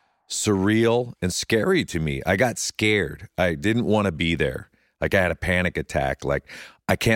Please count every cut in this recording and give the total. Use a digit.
0